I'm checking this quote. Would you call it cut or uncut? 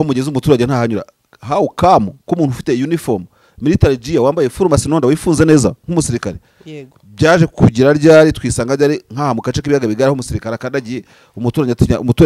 uncut